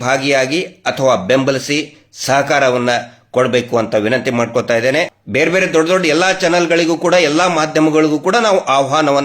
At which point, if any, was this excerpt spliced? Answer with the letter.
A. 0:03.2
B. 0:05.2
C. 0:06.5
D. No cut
B